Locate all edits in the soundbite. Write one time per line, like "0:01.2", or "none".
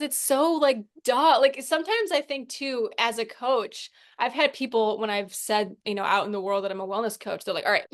none

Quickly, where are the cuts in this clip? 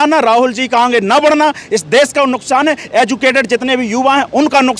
none

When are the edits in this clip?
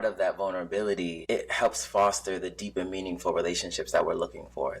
0:01.2

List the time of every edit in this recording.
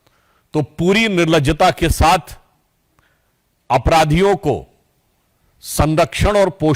none

